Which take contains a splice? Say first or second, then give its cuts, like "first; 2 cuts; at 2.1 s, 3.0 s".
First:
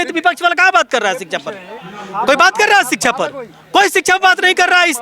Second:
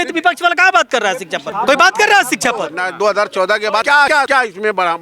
second; 3 cuts; at 1.4 s, 2.8 s, 4.1 s